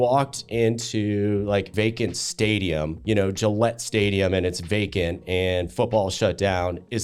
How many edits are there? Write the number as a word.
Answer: two